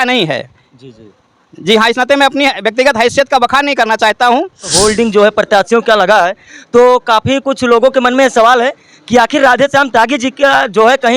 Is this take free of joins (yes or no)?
no